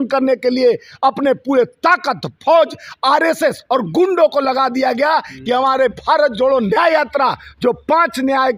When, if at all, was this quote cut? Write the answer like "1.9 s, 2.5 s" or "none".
none